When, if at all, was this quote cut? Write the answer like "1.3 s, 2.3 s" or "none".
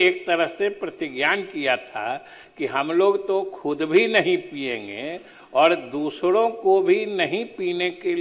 none